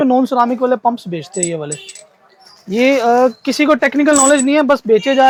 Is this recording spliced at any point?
no; 0 cuts

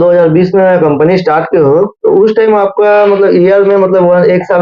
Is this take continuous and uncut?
yes; 0 cuts

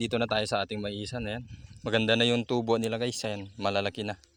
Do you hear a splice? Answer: no; 0 cuts

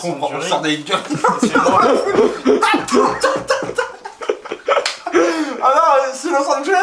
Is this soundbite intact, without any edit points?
yes; 0 cuts

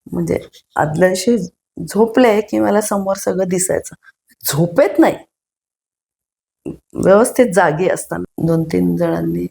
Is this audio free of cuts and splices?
no; 1 cut; at 8.2 s

